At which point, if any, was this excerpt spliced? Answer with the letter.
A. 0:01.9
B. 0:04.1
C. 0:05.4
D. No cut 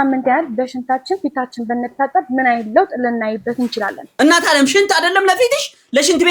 B